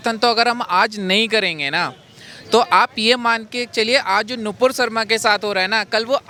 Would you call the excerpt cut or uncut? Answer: uncut